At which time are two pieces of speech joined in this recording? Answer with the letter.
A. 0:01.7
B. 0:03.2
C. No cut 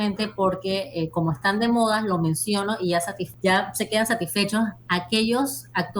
B